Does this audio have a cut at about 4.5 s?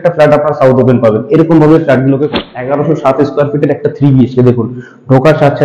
no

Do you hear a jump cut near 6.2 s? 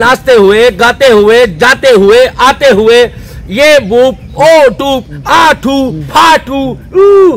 no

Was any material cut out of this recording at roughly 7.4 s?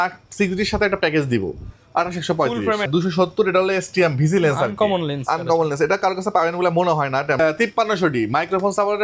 yes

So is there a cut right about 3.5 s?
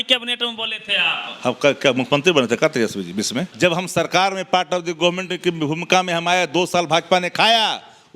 yes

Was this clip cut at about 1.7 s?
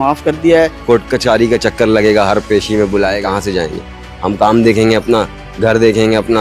no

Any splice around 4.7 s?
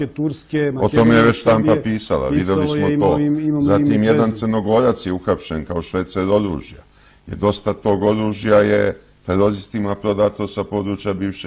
no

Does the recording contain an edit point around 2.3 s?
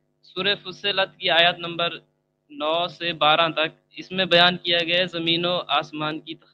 no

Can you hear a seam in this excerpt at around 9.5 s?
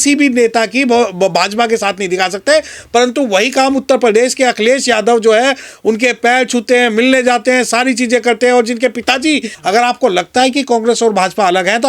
yes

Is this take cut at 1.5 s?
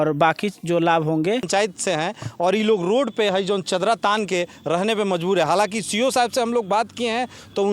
yes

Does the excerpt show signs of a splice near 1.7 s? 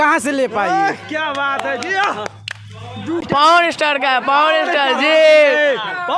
no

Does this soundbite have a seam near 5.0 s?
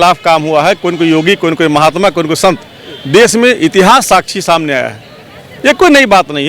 no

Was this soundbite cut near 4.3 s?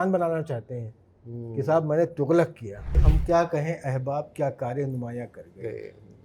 no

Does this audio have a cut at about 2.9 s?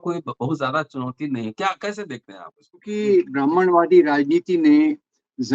yes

